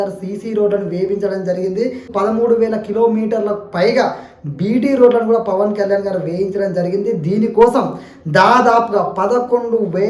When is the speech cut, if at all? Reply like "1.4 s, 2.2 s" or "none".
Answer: 2.2 s